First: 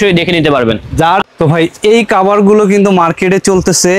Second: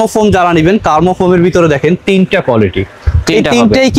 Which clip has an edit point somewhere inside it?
first; 1 cut; at 1.2 s

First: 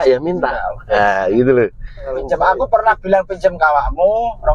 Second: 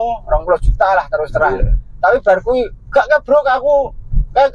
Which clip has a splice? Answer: first; 1 cut; at 2.2 s

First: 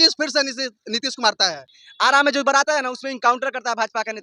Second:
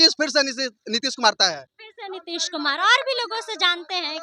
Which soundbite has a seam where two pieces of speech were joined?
first; 1 cut; at 1.8 s

